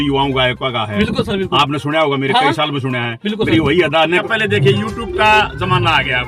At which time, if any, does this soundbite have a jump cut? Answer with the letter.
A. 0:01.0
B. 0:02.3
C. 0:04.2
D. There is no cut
C